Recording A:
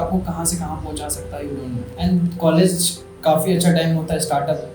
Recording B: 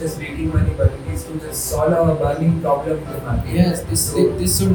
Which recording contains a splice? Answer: A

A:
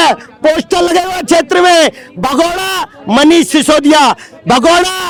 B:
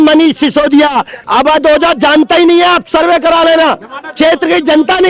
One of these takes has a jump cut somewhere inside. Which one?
B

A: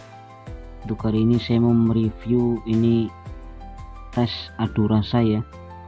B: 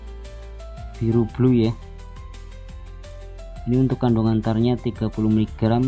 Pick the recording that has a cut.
B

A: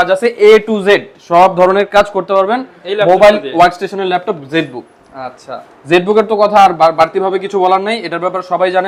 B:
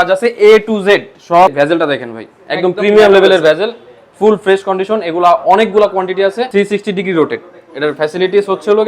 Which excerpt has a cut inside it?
B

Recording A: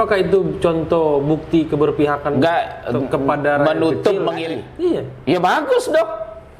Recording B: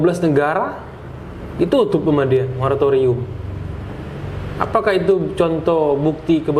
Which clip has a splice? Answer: A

